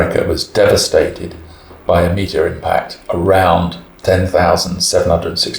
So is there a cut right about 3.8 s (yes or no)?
yes